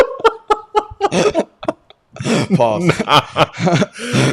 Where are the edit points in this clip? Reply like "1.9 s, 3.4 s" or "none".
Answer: none